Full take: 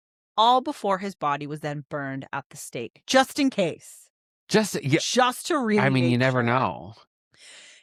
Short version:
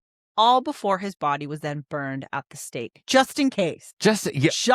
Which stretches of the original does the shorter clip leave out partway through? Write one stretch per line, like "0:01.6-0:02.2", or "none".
0:03.8-0:04.3